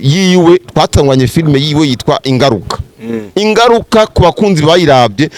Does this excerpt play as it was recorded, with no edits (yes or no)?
yes